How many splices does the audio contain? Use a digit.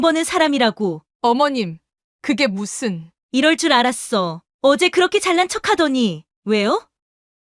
1